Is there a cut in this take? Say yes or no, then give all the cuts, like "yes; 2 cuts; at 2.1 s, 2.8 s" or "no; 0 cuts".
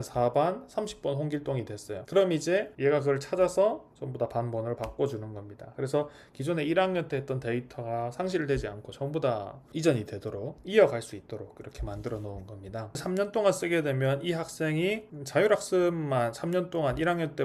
yes; 1 cut; at 13.0 s